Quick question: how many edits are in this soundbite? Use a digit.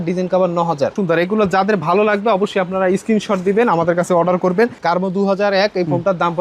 2